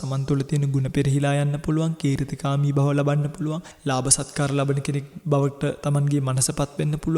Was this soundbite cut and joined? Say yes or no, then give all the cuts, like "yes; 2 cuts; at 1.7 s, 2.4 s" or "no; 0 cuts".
yes; 2 cuts; at 3.7 s, 5.1 s